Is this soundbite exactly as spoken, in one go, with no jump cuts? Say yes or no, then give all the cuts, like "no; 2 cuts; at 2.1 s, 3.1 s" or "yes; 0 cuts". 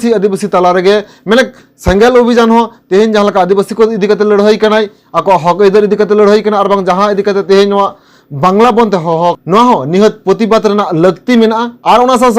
no; 1 cut; at 9.4 s